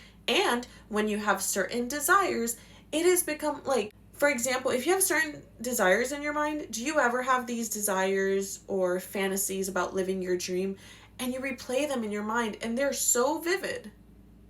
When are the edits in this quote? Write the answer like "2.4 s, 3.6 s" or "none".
4.0 s